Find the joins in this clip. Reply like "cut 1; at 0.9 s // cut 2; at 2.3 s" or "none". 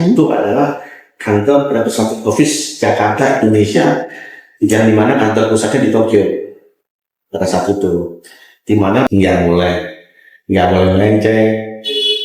cut 1; at 9.1 s